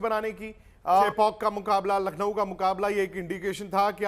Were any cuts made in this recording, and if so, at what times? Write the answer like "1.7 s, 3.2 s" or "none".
1.1 s